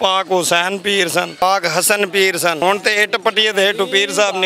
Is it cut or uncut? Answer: cut